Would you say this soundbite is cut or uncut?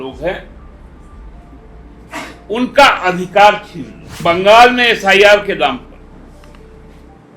cut